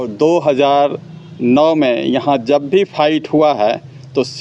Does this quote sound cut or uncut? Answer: uncut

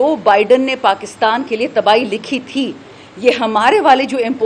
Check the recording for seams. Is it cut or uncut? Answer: uncut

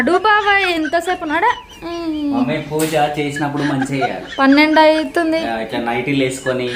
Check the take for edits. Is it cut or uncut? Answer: uncut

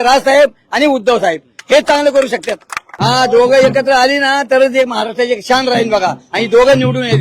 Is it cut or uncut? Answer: cut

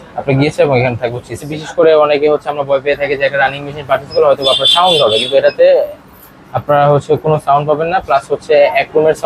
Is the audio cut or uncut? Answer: cut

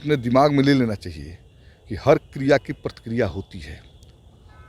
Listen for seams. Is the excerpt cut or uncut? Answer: uncut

